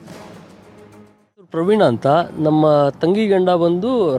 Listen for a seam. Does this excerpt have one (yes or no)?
yes